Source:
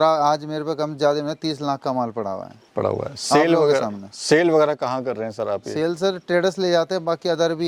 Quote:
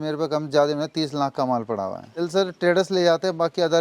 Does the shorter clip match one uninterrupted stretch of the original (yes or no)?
no